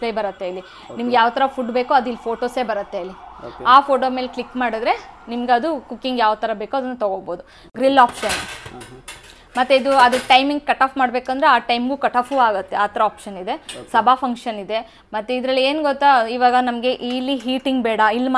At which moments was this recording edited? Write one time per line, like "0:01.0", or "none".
none